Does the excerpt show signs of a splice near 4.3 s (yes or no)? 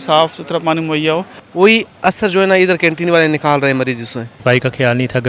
yes